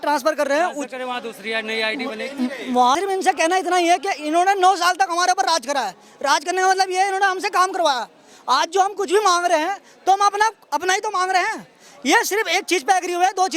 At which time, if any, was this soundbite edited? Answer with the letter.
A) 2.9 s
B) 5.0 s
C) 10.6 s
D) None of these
A